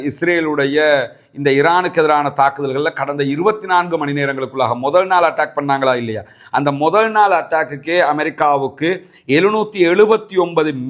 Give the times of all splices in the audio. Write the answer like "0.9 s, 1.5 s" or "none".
none